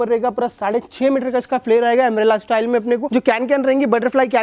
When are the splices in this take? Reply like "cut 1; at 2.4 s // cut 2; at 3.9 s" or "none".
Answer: cut 1; at 3.1 s